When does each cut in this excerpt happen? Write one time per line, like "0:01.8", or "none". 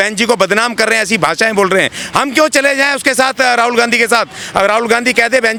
none